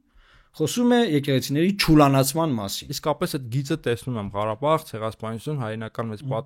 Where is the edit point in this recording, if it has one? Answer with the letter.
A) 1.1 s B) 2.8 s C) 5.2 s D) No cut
B